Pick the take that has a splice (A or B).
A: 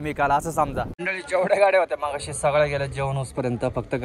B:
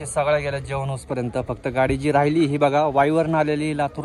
A